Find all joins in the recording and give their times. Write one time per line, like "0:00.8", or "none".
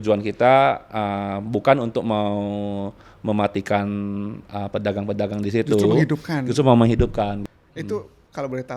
0:07.5